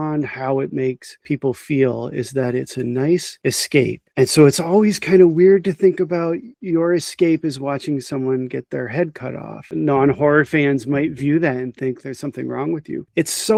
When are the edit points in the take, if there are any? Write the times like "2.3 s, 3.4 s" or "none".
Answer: none